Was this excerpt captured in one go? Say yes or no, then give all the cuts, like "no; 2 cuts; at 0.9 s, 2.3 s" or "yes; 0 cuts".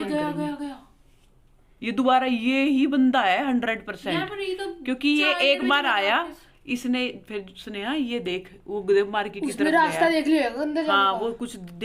yes; 0 cuts